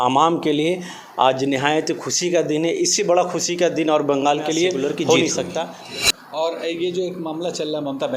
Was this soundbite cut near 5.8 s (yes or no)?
yes